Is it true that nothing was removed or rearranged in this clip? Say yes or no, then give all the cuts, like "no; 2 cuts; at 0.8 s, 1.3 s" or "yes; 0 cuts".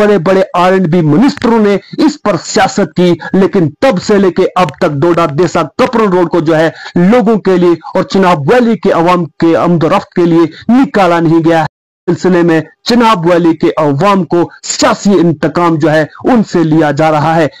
no; 1 cut; at 11.7 s